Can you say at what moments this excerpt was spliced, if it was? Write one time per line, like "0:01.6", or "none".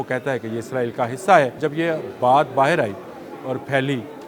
0:01.6